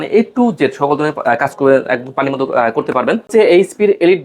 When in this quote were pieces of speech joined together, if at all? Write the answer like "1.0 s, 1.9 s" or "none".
3.3 s